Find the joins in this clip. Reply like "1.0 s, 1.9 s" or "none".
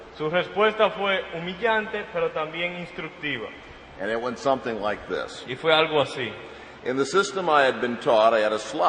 3.5 s